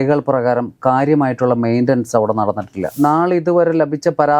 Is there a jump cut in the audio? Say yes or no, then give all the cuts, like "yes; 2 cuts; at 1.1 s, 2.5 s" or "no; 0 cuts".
yes; 1 cut; at 2.9 s